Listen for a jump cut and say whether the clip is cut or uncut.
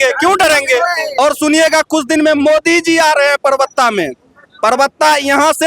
cut